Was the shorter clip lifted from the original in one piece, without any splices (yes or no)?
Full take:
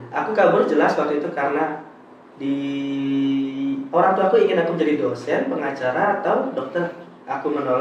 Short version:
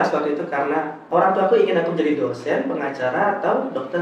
no